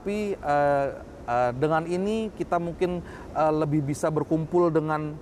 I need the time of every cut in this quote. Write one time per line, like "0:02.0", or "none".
none